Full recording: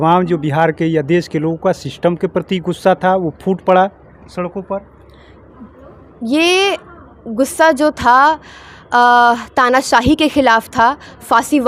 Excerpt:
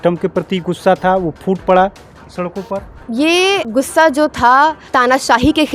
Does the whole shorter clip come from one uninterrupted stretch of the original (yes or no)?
no